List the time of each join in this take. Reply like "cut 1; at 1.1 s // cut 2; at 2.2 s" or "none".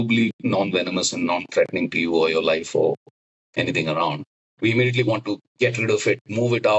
none